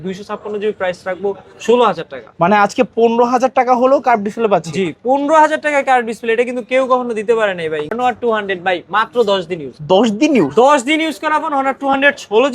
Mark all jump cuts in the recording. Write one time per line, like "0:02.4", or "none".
0:08.0